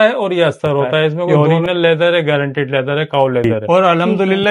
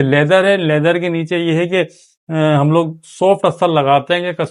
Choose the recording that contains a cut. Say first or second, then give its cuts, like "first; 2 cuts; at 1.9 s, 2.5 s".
first; 2 cuts; at 1.3 s, 3.4 s